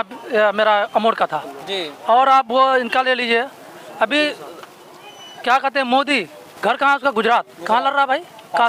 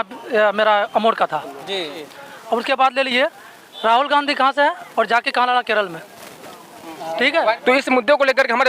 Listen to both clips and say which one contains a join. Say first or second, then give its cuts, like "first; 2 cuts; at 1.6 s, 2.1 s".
second; 2 cuts; at 1.9 s, 7.6 s